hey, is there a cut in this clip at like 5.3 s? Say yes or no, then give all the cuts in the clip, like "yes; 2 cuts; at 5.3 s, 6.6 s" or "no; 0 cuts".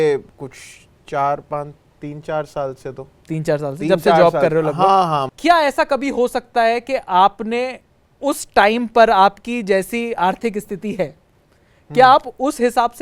yes; 1 cut; at 5.3 s